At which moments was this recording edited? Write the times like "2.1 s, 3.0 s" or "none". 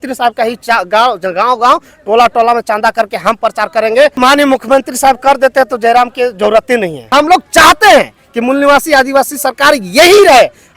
4.2 s, 7.1 s